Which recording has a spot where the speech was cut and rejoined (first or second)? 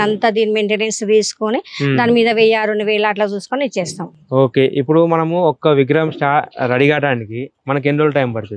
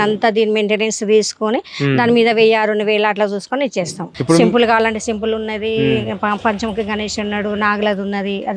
second